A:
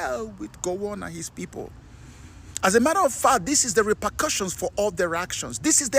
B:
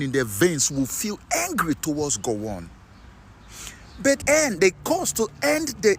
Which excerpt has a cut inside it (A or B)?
B